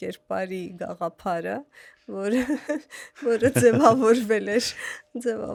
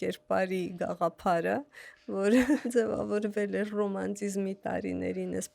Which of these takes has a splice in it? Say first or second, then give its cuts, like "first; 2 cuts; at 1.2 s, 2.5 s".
second; 1 cut; at 2.6 s